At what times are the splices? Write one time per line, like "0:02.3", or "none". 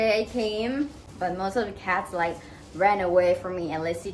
0:01.0